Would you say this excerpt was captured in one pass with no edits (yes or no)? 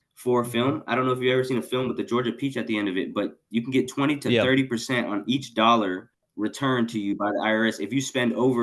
yes